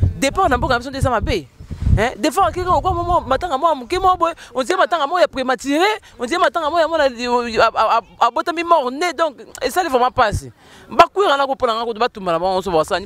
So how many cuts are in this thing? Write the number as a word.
zero